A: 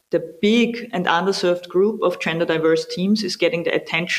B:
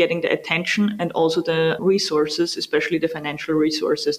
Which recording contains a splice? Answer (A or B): B